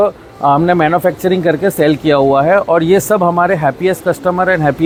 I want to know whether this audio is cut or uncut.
uncut